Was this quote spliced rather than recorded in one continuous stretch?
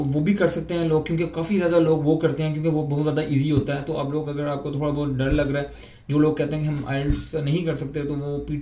no; 0 cuts

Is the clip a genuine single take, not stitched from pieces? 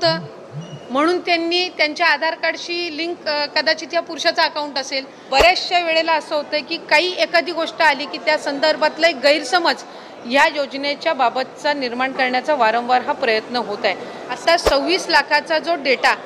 no; 2 cuts; at 5.1 s, 14.4 s

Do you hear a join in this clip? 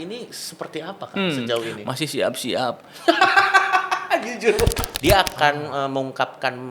yes; 1 cut; at 4.9 s

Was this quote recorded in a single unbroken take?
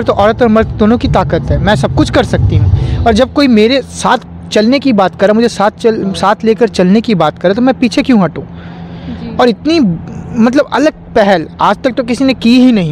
yes; 0 cuts

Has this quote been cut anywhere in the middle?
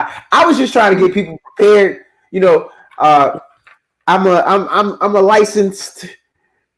no; 0 cuts

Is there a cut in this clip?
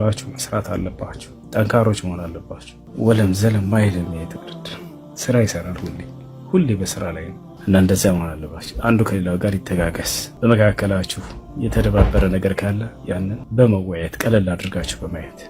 no; 0 cuts

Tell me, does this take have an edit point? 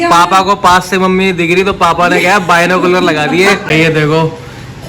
yes; 1 cut; at 3.6 s

